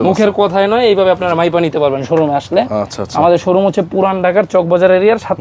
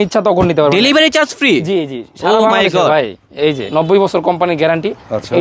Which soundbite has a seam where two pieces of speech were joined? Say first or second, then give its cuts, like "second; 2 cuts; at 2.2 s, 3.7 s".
second; 1 cut; at 3.6 s